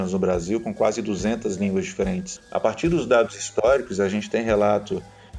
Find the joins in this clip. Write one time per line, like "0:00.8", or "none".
0:02.3